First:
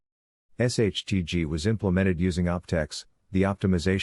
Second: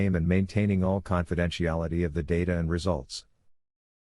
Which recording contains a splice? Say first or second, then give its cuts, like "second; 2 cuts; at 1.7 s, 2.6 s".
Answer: second; 1 cut; at 2.4 s